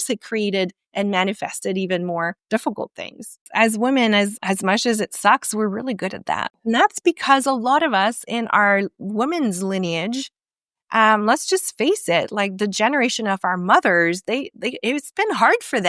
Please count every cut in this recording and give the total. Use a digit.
3